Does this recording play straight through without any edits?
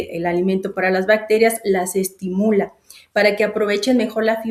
yes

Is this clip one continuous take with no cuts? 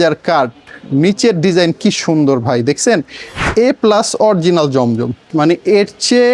no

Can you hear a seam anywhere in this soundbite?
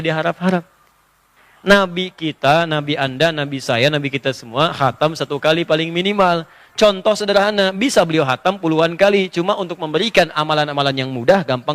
yes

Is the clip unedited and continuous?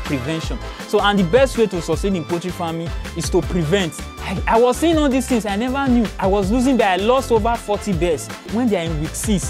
no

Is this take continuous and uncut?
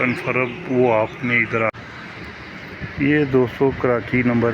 no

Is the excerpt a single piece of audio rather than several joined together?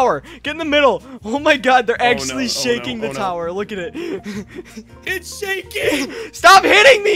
no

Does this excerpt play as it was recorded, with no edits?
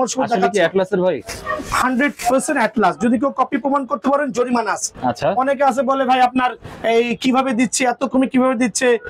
yes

